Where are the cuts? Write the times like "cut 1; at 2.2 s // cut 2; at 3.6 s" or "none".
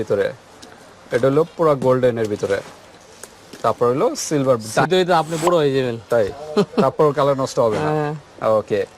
cut 1; at 4.9 s